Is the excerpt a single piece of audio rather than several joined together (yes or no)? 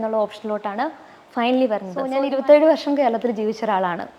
no